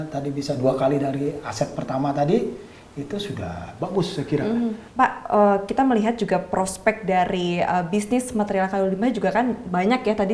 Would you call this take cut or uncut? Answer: cut